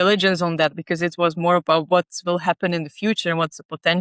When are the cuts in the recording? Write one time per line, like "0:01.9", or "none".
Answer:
none